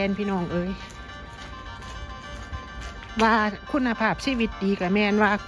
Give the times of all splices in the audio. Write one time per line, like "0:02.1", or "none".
none